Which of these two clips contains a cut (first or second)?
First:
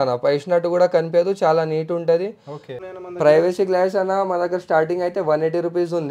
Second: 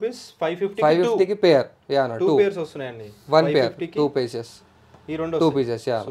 first